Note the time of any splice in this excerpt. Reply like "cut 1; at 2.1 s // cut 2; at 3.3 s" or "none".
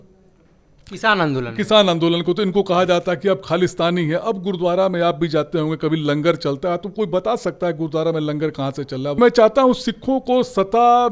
cut 1; at 9.2 s